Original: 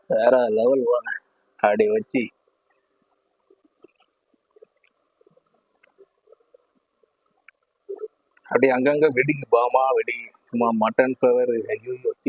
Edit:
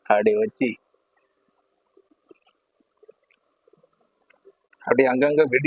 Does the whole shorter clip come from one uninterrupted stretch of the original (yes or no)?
no